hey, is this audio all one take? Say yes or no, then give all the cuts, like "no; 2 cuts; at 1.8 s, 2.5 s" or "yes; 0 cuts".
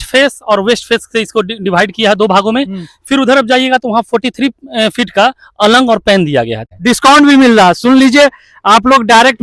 no; 1 cut; at 6.6 s